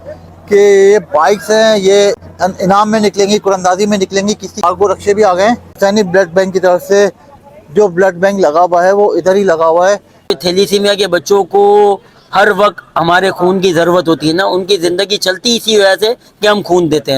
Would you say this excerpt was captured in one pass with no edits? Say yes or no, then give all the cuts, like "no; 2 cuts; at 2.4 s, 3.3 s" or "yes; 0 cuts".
no; 4 cuts; at 2.3 s, 4.6 s, 5.7 s, 10.3 s